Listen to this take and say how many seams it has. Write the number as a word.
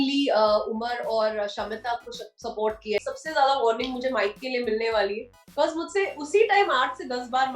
one